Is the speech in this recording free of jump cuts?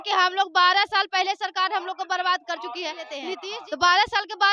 no; 1 cut; at 3.5 s

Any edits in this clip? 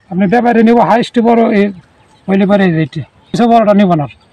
yes; 1 cut; at 3.3 s

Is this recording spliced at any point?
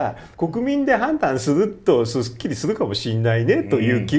no; 0 cuts

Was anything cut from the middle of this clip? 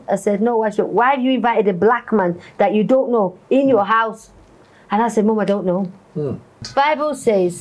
yes; 1 cut; at 6.6 s

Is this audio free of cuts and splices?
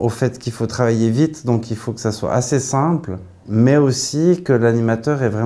no; 1 cut; at 3.4 s

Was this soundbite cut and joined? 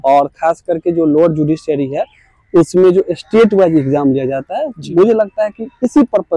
no; 0 cuts

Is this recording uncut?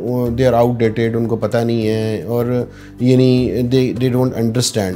yes; 0 cuts

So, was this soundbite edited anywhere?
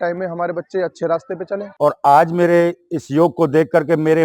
yes; 1 cut; at 1.6 s

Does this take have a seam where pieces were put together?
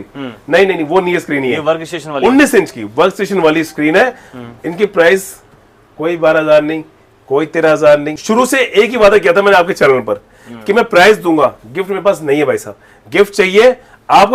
no; 0 cuts

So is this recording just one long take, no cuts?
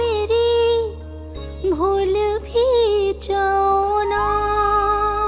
yes; 0 cuts

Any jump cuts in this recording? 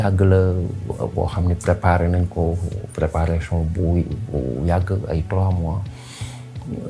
no; 0 cuts

